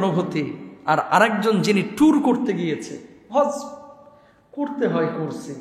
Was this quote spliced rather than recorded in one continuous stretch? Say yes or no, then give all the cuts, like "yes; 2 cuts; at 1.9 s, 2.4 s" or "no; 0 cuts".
no; 0 cuts